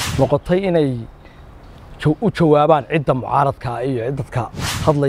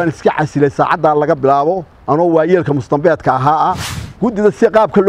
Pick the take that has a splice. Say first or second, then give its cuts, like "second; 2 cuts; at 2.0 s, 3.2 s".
second; 1 cut; at 4.0 s